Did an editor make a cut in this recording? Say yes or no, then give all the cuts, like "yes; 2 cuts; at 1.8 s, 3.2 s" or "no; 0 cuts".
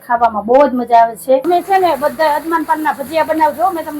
yes; 1 cut; at 1.4 s